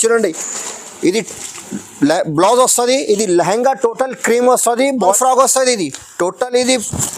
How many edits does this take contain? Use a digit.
1